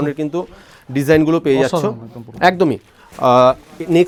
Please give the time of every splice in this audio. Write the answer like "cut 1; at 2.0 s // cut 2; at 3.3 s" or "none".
none